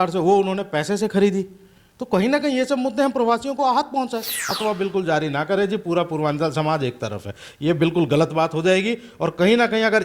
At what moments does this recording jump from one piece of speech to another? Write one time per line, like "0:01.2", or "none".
0:04.4